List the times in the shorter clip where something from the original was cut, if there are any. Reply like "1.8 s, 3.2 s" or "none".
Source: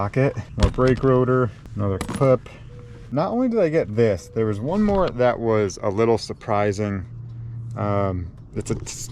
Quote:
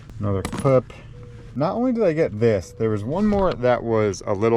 none

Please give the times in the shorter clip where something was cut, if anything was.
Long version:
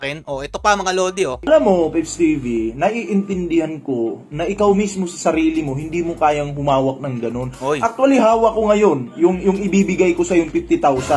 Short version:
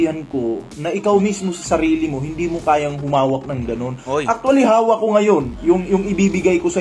none

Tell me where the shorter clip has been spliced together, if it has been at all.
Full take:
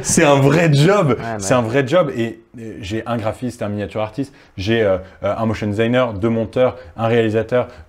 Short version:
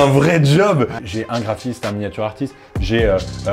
1.0 s

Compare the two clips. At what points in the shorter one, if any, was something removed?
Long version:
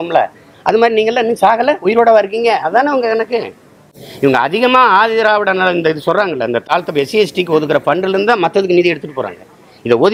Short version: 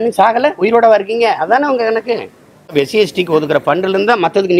2.7 s

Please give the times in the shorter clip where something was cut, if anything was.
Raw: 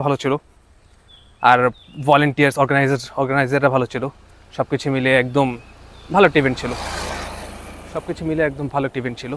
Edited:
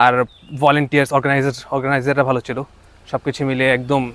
none

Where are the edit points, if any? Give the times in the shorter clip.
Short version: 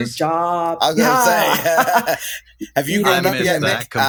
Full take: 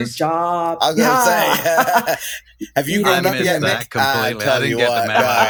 none

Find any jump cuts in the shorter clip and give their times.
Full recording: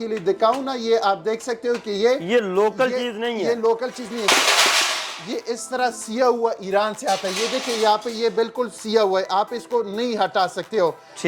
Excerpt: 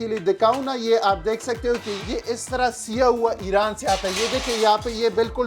1.9 s

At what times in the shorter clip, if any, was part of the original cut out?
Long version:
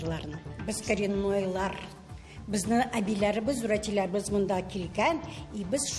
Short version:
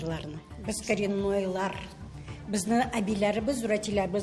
none

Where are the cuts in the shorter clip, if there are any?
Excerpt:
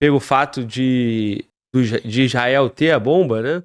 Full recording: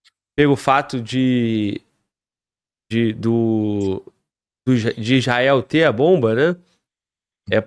1.5 s

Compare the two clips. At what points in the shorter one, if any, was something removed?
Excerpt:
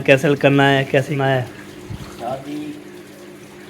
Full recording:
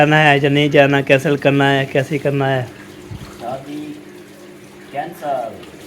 1.2 s

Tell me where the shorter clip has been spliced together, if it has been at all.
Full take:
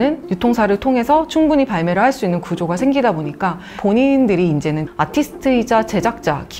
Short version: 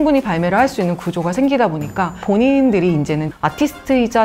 2.1 s

